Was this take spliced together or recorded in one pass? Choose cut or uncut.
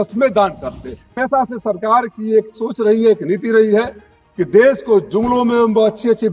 cut